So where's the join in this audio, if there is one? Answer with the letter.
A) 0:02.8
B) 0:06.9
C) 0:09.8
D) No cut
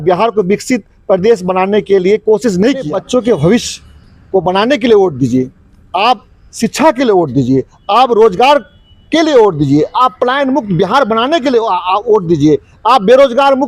A